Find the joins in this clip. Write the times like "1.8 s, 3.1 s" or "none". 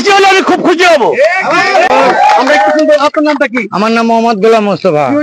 none

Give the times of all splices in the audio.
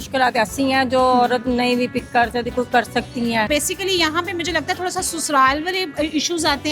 3.5 s

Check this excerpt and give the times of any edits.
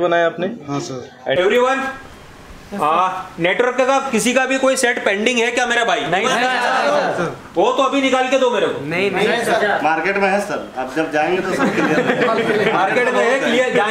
1.4 s

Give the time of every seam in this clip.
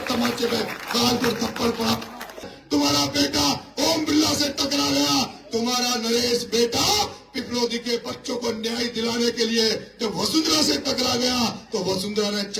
2.5 s

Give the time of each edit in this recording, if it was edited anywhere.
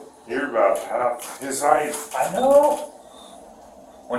none

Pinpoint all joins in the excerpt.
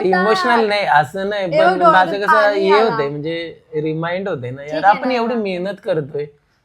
none

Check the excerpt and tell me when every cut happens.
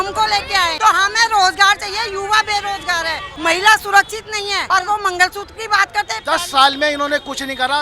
0.8 s, 3.3 s, 4.6 s, 6.2 s

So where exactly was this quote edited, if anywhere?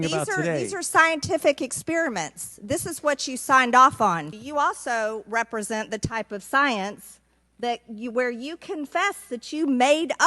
4.4 s

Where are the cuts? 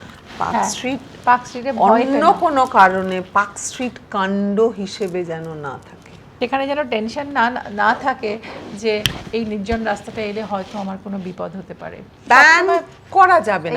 6.2 s, 12.1 s

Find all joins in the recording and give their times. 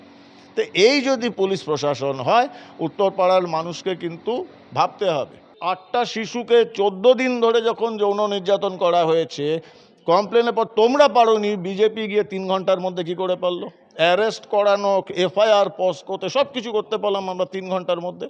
5.7 s

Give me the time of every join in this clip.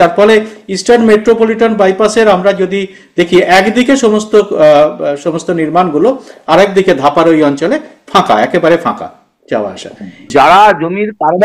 10.3 s

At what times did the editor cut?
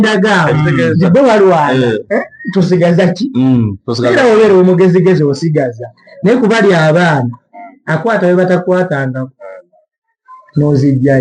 none

